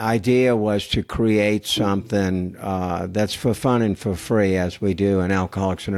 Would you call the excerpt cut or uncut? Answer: uncut